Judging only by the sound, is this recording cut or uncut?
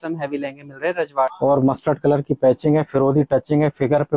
cut